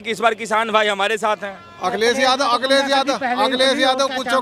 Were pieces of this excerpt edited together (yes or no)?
no